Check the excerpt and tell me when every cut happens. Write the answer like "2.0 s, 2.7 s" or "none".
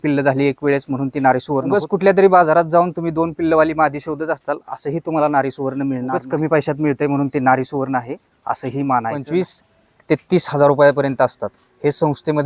1.7 s, 6.2 s, 9.2 s